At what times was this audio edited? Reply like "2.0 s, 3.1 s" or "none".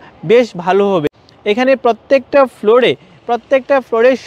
1.0 s